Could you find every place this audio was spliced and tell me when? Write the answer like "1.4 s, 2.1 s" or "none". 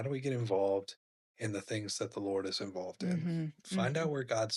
3.6 s